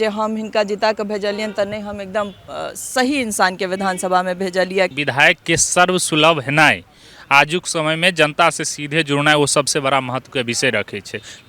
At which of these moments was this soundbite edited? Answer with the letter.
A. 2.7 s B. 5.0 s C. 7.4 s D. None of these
B